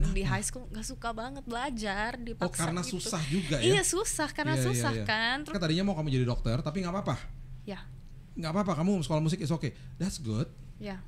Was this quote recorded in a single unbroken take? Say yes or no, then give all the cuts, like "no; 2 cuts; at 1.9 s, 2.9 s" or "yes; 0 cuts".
no; 1 cut; at 5.5 s